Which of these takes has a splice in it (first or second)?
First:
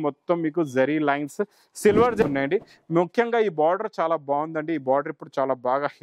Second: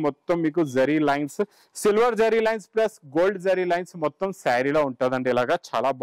first